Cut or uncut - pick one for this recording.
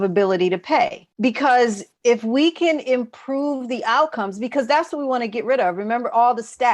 cut